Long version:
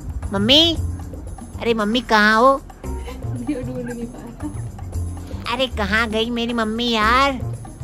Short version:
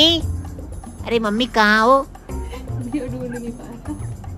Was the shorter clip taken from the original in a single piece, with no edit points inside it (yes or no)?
yes